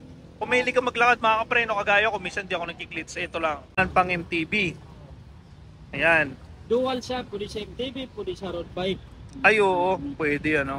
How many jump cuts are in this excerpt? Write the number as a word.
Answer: one